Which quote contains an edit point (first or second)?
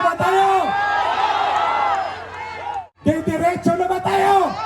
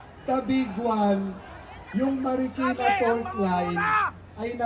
first